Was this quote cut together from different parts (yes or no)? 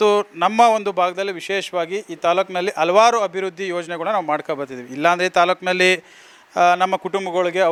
no